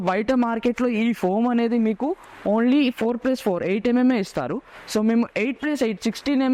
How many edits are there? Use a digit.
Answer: 0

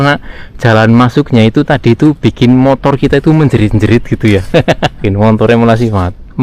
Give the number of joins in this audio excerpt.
1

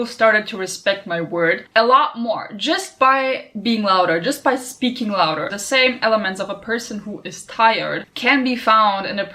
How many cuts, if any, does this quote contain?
2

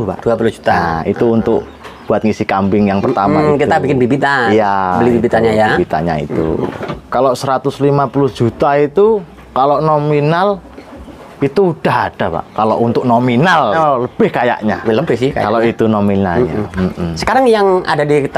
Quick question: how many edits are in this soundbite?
2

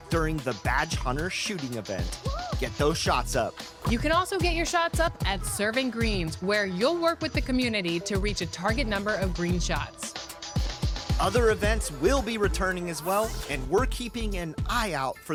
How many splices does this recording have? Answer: 0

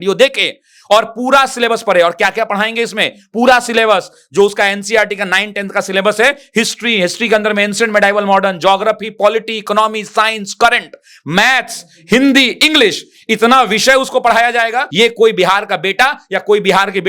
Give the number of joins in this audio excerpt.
1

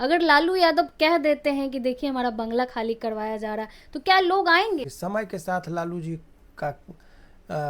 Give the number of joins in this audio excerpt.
1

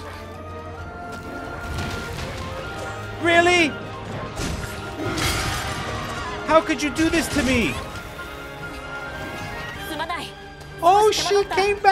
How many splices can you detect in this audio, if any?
0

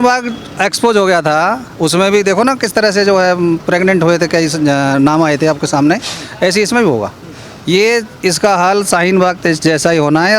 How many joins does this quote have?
0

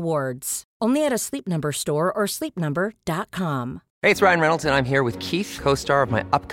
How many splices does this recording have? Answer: 1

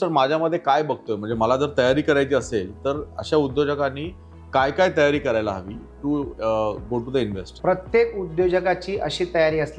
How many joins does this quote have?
1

